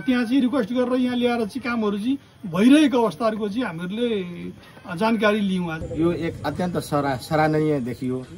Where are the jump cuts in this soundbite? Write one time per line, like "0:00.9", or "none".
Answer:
0:05.7